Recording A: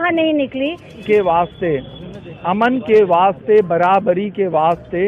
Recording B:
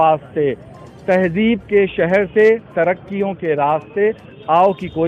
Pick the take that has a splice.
A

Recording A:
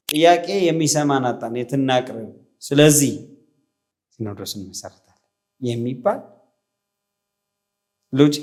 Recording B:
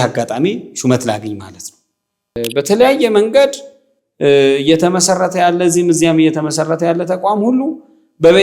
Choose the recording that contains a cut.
B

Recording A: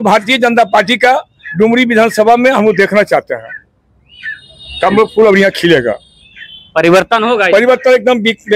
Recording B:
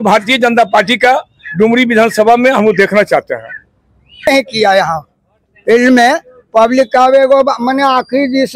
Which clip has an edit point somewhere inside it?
B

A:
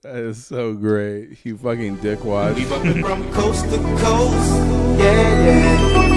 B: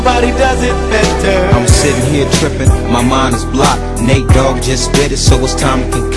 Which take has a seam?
A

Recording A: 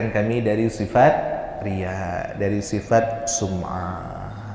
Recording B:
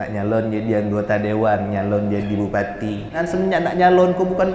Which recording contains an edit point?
B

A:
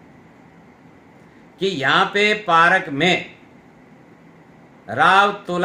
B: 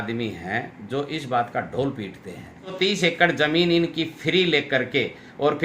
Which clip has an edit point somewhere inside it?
B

